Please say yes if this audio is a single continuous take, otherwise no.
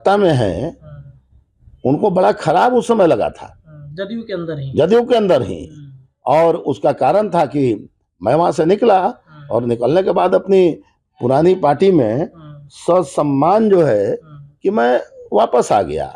yes